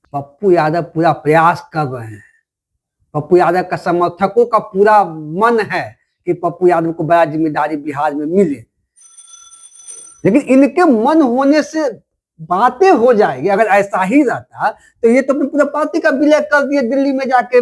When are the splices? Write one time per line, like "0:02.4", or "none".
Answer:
none